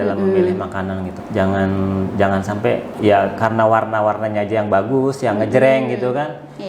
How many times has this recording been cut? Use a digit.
2